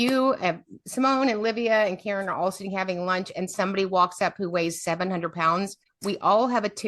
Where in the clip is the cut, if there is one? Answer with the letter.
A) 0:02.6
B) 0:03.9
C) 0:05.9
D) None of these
C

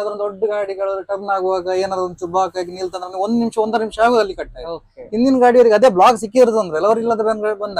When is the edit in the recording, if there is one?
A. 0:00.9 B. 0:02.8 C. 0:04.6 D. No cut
D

